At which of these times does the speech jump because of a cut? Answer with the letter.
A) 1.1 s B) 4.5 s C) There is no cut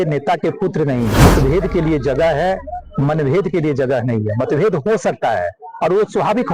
A